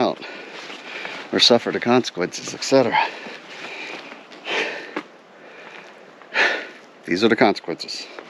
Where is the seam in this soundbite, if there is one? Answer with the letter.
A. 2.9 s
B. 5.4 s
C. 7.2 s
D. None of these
D